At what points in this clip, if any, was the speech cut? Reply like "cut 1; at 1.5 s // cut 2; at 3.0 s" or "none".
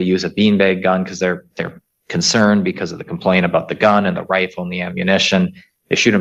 none